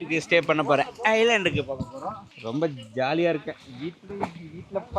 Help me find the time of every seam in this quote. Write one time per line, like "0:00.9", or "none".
0:02.3